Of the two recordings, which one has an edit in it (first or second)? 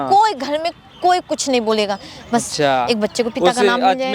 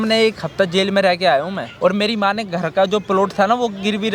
second